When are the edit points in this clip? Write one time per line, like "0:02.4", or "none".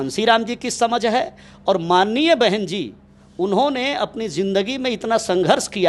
none